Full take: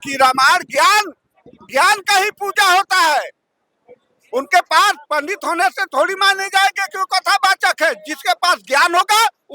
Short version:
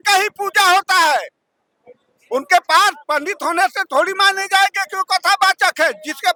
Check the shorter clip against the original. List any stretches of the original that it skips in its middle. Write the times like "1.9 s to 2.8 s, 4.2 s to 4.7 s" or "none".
none